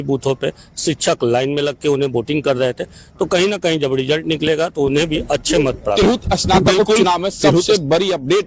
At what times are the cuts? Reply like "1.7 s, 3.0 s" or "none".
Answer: none

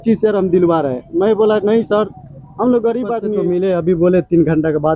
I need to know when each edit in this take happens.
3.3 s

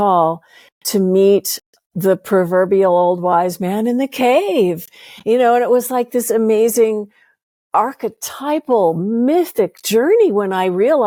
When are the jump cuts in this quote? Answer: none

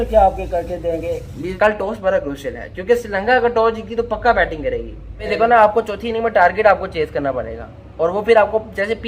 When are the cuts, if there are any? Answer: 1.4 s, 5.3 s

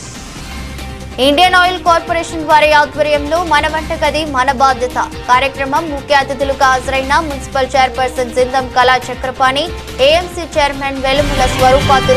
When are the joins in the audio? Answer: 1.2 s

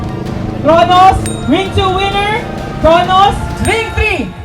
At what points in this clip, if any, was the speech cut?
3.5 s

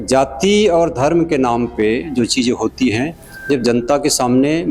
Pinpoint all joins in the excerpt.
none

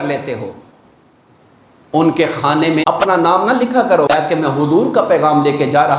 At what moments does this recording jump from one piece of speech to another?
2.8 s, 4.1 s

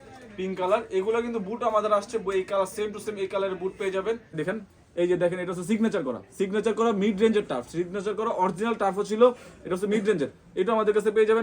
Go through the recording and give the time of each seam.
4.3 s

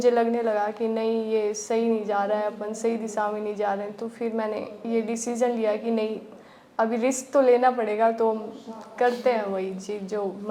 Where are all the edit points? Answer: none

